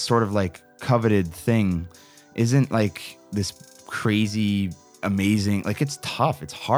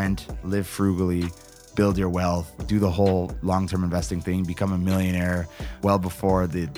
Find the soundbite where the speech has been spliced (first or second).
second